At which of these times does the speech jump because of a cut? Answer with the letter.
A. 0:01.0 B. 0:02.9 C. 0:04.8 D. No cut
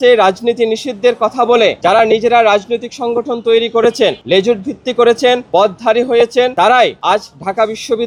D